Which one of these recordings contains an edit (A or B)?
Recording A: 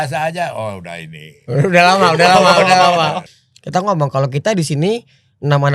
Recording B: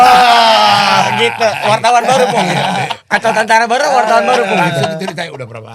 A